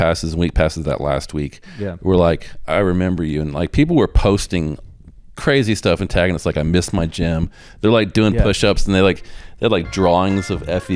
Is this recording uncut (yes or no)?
yes